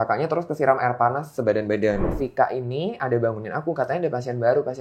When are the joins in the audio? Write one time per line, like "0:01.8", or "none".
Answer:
0:02.1